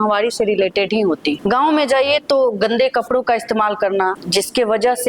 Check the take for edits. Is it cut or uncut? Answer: cut